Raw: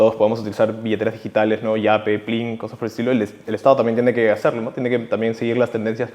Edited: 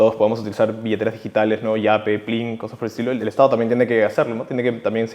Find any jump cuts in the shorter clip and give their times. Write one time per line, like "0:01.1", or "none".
0:03.2